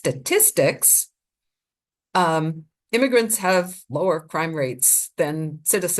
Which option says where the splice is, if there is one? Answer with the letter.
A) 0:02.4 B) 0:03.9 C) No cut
C